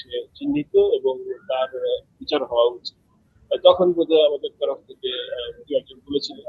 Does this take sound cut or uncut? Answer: uncut